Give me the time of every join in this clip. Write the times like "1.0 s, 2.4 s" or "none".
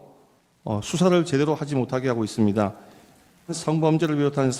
3.5 s